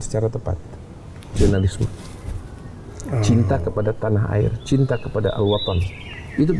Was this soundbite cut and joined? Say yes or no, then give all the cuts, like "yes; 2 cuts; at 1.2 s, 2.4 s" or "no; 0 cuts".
yes; 1 cut; at 1.3 s